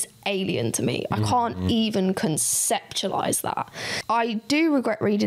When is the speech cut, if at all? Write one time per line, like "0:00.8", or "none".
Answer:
0:03.9